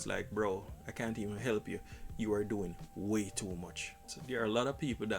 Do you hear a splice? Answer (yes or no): yes